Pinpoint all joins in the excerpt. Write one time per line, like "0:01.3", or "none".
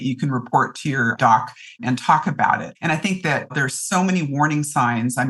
none